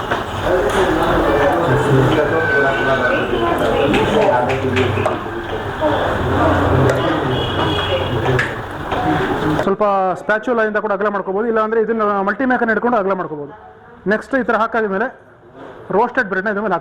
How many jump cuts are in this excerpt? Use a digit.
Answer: 1